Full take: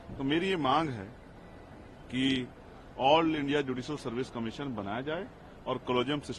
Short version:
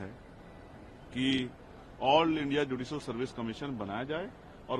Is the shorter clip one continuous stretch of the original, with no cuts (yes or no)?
yes